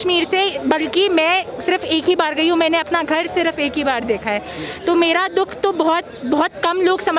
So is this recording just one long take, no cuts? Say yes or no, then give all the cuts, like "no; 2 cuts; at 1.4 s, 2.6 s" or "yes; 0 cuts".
yes; 0 cuts